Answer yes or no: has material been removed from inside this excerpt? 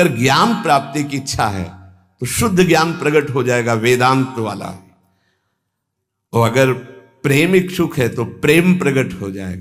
no